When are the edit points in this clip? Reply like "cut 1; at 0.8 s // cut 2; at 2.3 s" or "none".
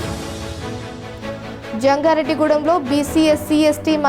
cut 1; at 1.7 s